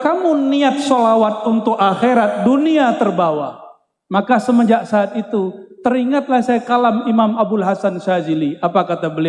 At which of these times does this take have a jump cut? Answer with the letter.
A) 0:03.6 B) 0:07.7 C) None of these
C